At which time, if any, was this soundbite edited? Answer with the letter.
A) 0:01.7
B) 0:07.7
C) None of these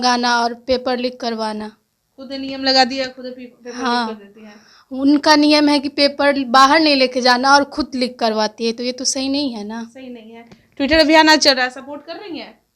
C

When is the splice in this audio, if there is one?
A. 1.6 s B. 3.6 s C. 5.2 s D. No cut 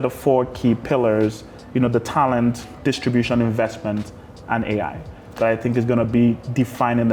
D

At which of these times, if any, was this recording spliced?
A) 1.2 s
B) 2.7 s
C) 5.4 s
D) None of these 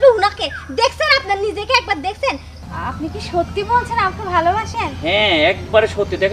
B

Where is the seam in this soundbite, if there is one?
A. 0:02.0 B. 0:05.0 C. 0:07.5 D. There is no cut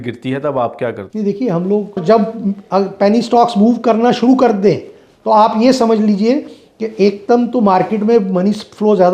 A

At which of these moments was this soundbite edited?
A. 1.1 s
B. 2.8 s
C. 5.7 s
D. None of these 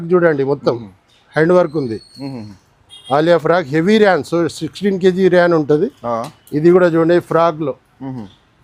D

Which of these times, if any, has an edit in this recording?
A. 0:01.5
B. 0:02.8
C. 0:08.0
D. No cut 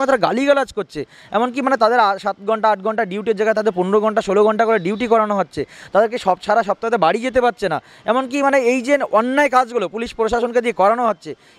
D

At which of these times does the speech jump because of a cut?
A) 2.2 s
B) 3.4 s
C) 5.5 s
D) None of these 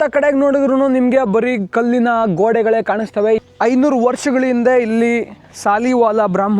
B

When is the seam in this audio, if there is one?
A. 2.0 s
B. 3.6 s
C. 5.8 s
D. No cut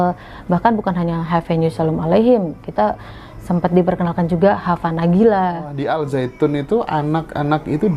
C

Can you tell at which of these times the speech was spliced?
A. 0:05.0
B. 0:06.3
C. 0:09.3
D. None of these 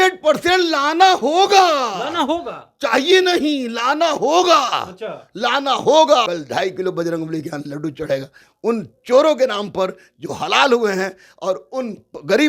B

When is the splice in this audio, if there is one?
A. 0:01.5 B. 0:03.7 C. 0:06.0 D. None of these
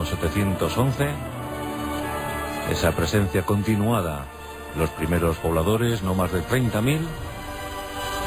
A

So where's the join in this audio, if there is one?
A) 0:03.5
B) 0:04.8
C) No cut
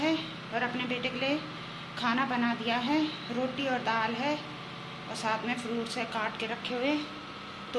C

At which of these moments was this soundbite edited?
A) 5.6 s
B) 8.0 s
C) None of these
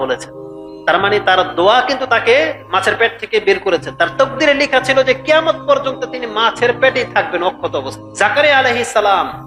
B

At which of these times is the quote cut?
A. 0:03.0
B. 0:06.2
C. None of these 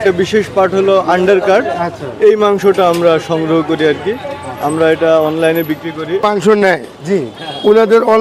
B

